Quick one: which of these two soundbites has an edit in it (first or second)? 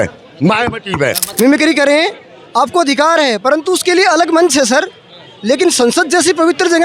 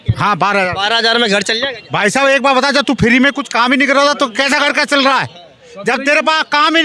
first